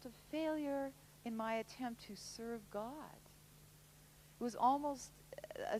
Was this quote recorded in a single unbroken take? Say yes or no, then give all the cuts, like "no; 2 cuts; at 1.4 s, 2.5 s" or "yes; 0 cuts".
yes; 0 cuts